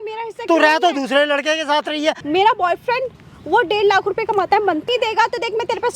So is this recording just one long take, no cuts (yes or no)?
no